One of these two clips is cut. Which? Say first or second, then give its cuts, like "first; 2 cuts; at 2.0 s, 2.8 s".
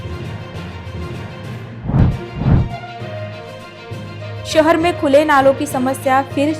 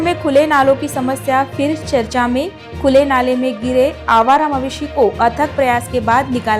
first; 1 cut; at 1.6 s